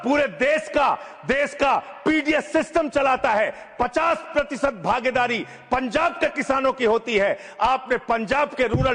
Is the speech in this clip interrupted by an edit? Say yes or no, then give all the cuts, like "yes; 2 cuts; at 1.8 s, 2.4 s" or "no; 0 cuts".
no; 0 cuts